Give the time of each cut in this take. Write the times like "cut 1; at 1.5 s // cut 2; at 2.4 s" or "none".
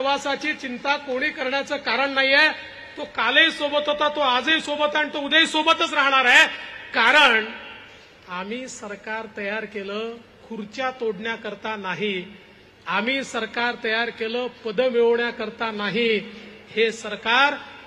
none